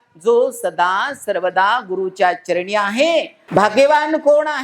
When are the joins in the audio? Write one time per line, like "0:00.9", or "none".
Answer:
0:03.4